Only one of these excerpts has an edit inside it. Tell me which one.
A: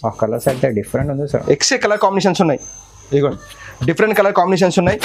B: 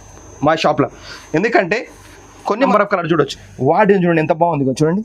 B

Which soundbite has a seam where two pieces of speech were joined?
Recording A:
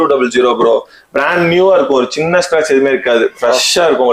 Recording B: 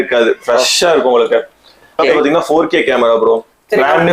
B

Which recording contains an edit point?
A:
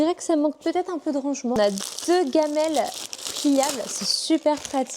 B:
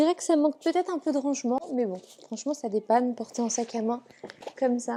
A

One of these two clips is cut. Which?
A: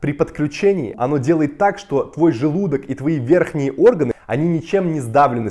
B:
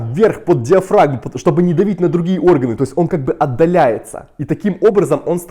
A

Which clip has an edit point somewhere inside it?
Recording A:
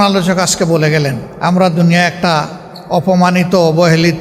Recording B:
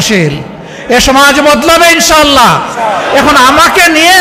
A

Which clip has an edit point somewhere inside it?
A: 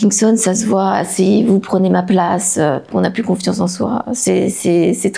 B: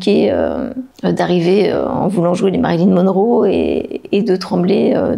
A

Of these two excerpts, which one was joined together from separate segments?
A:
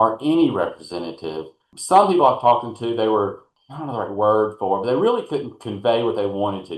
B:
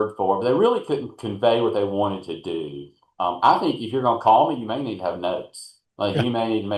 A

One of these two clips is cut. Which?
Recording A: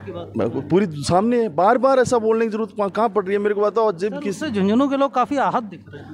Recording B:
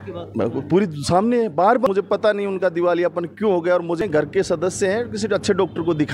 B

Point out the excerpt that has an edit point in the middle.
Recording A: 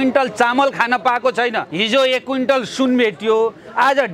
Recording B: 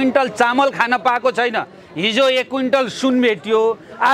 A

